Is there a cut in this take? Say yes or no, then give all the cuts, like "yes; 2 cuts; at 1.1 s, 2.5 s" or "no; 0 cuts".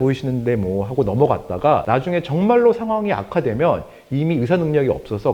yes; 1 cut; at 1.8 s